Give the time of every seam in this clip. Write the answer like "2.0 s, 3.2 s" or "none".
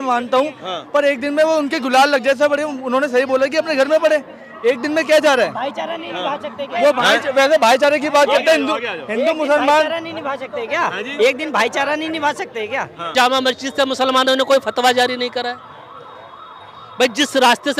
13.1 s